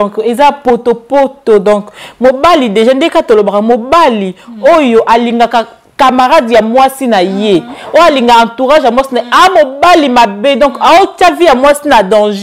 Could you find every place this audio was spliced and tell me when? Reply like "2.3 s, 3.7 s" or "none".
none

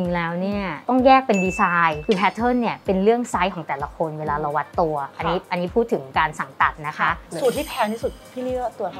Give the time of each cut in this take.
7.2 s

